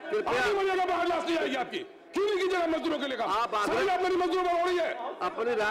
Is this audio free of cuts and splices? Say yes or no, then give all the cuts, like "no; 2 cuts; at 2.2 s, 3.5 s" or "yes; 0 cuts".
yes; 0 cuts